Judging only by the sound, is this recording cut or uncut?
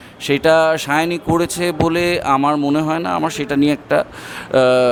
uncut